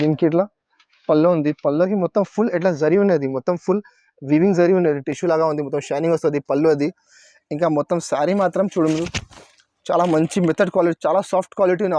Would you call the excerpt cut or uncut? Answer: uncut